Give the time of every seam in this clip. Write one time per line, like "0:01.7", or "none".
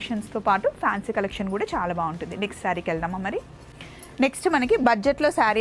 none